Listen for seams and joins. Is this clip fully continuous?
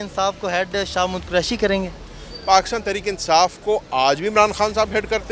yes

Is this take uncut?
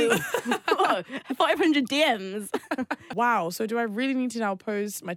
no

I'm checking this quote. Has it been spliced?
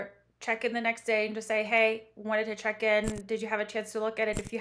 no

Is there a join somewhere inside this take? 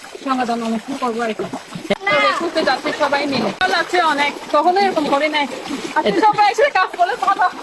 yes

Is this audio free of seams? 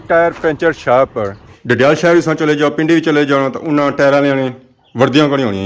no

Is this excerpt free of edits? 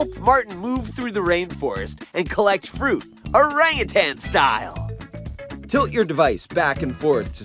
yes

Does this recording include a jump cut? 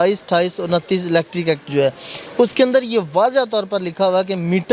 no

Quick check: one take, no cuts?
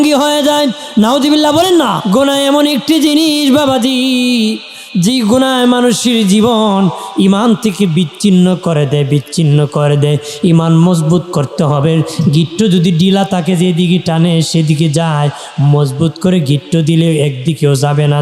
no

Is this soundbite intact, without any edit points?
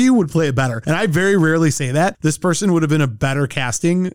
yes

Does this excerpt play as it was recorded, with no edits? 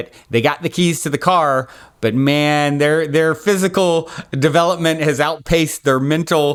yes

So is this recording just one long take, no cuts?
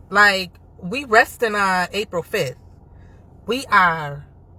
yes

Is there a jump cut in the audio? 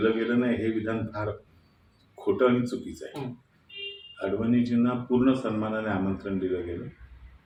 no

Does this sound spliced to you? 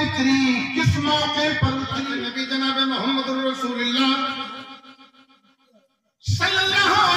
yes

